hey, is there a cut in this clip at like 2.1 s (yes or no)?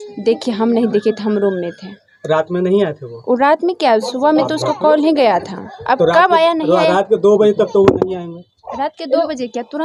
no